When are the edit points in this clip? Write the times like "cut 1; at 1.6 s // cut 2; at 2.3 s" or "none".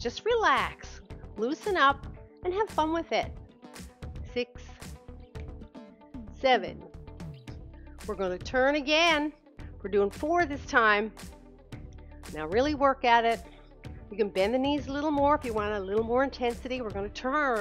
none